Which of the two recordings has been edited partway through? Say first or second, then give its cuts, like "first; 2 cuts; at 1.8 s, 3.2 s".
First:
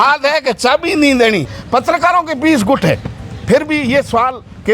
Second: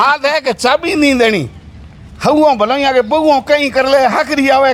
first; 1 cut; at 1.6 s